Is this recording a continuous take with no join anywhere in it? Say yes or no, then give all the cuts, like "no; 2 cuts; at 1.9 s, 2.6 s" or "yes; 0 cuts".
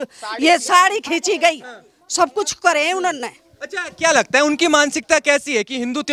yes; 0 cuts